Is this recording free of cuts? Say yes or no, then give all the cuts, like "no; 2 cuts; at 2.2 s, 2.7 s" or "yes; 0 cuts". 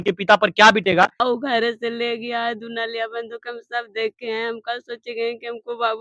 no; 1 cut; at 1.2 s